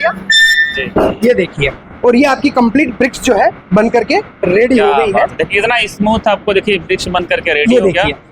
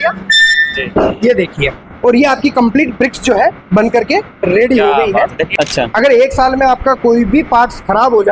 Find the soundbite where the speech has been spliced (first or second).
second